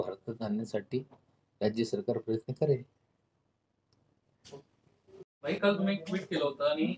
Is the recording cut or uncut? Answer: cut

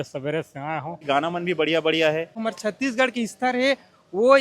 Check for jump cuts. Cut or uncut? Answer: cut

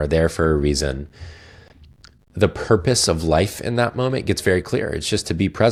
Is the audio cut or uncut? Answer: uncut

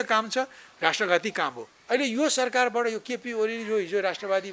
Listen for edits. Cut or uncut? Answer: cut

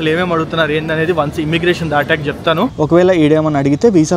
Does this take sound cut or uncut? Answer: cut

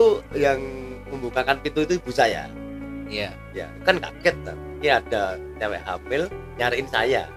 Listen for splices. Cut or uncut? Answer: uncut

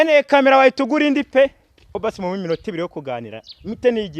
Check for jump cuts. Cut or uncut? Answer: cut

